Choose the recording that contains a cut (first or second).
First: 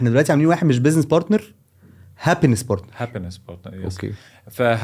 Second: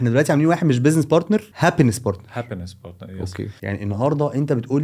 second